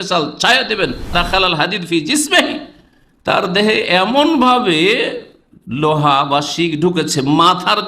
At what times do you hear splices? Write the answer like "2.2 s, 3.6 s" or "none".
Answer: 1.1 s